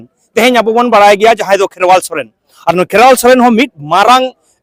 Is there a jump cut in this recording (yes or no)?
no